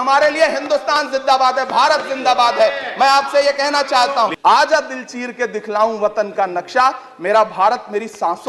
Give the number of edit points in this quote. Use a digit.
1